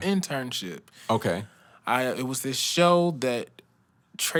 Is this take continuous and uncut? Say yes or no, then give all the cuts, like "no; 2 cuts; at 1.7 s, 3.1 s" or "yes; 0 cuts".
yes; 0 cuts